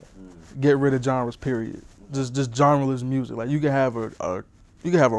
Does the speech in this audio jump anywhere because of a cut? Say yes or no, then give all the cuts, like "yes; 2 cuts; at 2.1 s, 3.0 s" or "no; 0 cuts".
no; 0 cuts